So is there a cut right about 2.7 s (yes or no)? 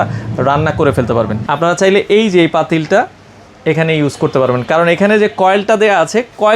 no